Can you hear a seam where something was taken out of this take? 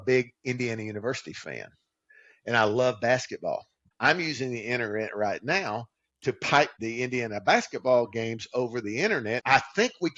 yes; 3 cuts; at 3.8 s, 6.8 s, 9.4 s

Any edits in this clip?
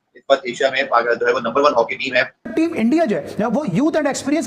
yes; 1 cut; at 2.5 s

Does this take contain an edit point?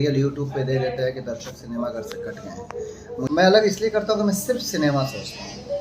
yes; 1 cut; at 3.3 s

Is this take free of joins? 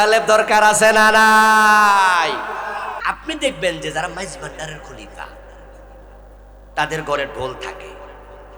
no; 1 cut; at 2.9 s

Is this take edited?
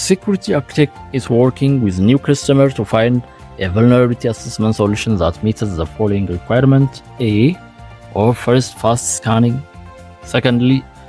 no; 0 cuts

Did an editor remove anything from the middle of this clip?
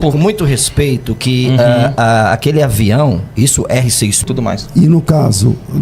yes; 1 cut; at 4.2 s

